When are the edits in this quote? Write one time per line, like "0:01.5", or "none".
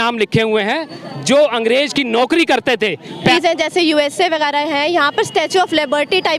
0:03.3